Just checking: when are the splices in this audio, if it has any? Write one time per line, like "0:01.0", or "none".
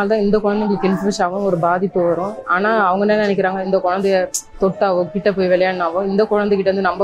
0:02.4
0:03.6